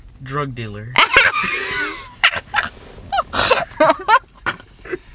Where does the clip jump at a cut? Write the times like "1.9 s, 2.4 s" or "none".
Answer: none